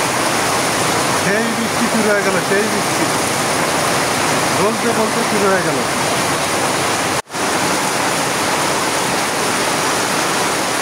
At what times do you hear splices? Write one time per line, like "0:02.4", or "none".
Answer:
0:07.2